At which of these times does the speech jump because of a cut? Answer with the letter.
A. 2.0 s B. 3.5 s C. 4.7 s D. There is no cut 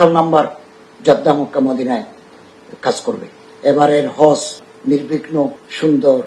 B